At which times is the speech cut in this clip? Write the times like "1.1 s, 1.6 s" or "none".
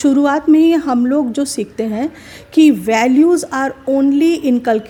none